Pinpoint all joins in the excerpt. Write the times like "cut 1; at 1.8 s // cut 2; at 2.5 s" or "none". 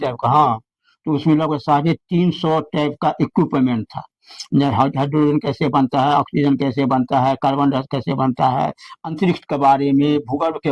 none